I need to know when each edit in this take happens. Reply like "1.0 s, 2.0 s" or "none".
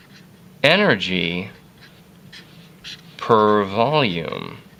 none